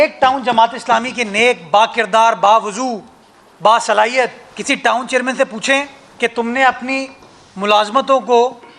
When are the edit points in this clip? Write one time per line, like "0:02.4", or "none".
0:04.5
0:06.0